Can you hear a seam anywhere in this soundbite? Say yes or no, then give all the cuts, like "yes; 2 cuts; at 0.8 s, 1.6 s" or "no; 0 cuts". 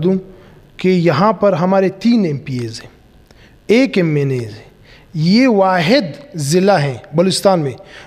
no; 0 cuts